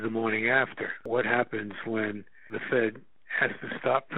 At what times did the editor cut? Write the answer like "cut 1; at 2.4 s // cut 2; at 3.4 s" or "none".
cut 1; at 1.0 s // cut 2; at 2.6 s